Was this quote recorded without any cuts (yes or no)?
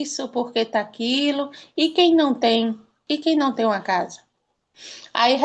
no